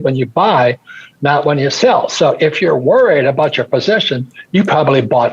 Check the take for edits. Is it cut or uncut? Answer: uncut